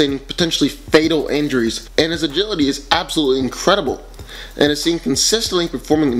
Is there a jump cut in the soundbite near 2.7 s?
yes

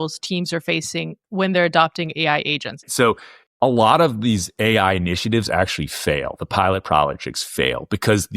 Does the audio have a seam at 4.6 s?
no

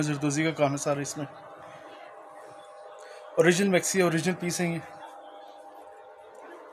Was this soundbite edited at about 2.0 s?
no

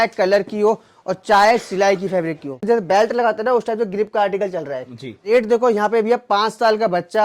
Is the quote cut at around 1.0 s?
no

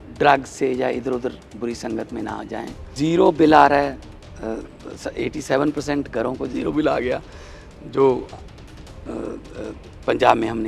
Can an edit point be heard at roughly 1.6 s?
no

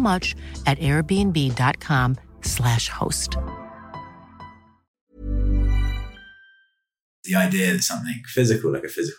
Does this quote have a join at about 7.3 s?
yes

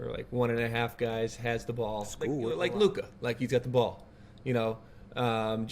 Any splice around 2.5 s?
yes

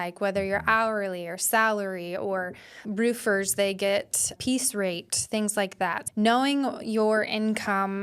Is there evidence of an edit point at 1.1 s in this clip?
no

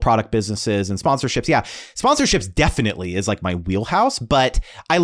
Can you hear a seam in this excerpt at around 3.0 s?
no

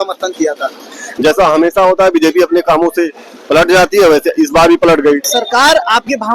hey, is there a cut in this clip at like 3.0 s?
no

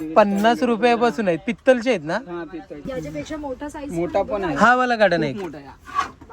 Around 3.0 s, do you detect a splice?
yes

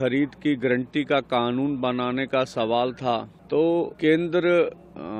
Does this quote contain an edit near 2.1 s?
no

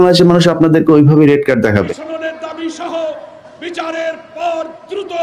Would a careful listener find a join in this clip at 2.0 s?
yes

